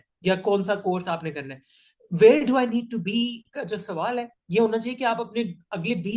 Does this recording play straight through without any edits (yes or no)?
yes